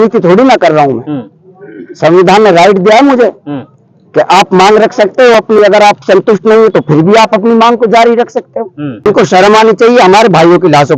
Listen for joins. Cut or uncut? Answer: cut